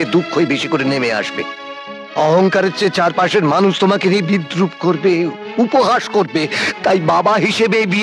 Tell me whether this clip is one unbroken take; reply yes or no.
yes